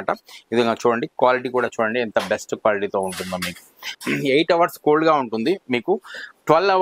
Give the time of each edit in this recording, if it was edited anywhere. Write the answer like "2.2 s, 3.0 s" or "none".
3.9 s

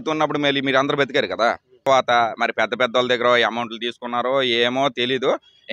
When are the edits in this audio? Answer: 1.9 s

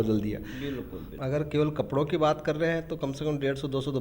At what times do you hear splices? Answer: 1.0 s

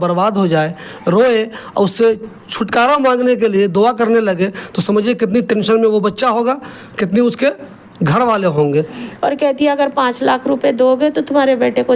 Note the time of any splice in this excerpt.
9.0 s

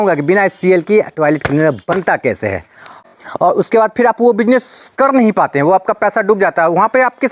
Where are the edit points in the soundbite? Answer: 3.1 s

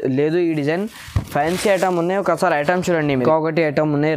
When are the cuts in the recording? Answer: 3.2 s

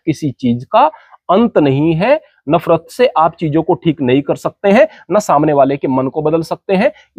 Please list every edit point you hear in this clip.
none

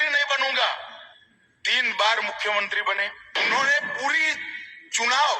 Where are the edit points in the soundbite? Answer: 3.2 s

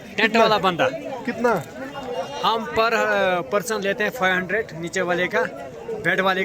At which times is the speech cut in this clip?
none

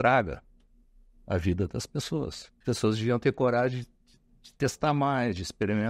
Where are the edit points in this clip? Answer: 2.5 s

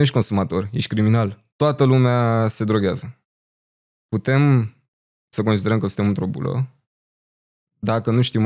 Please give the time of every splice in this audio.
1.4 s

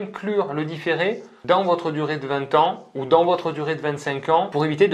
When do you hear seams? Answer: none

